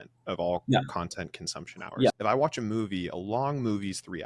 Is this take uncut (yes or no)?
no